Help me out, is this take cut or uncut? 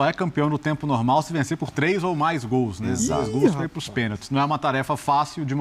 uncut